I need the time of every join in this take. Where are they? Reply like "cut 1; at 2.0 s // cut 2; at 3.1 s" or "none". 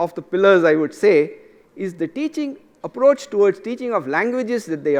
none